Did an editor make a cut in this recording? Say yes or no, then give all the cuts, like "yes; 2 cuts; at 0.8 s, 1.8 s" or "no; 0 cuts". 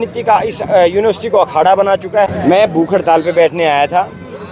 yes; 1 cut; at 2.3 s